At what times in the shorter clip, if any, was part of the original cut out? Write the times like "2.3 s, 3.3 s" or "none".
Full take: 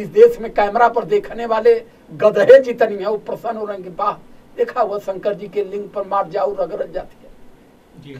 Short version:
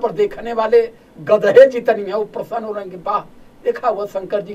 none